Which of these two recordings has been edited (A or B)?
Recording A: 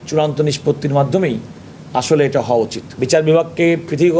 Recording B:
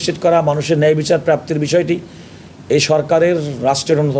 A